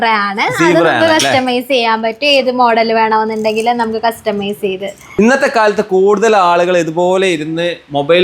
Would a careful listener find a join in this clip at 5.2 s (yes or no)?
yes